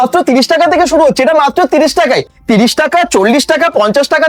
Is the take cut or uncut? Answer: uncut